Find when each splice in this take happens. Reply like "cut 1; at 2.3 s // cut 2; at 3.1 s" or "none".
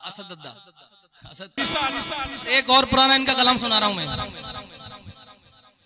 cut 1; at 1.6 s